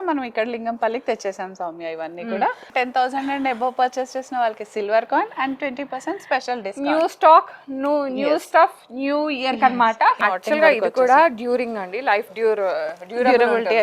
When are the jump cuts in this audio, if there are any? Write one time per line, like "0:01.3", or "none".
0:02.7
0:10.2